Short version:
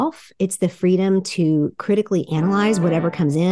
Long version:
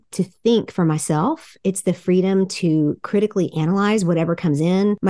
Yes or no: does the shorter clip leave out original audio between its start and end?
no